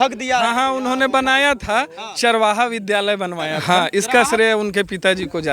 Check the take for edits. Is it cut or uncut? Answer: cut